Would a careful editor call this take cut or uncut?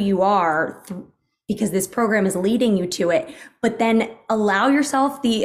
uncut